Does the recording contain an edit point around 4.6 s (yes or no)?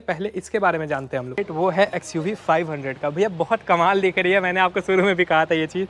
no